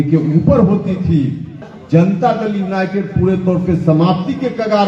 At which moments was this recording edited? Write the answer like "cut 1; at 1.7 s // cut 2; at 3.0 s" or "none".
cut 1; at 1.6 s